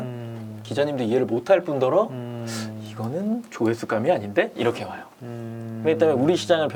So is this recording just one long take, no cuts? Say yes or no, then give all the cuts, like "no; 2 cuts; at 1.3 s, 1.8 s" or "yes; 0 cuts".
yes; 0 cuts